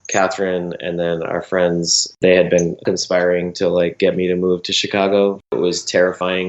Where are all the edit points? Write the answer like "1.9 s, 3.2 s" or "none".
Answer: 2.1 s, 2.8 s, 5.5 s